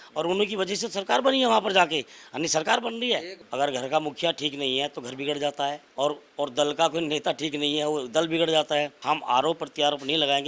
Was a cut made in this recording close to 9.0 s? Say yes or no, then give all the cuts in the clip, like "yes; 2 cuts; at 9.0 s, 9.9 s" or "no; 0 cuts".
yes; 3 cuts; at 3.4 s, 5.8 s, 9.0 s